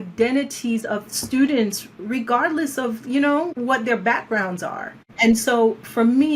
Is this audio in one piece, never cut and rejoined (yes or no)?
no